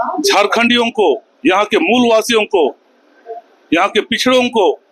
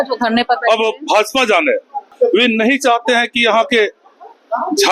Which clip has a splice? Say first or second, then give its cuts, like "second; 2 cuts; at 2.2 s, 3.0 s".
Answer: second; 1 cut; at 2.1 s